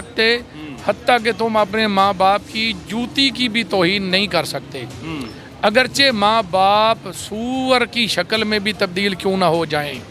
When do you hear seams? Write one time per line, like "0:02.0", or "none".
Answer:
none